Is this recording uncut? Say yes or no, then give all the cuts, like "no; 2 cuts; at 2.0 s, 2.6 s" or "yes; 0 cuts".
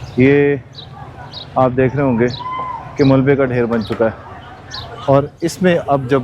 yes; 0 cuts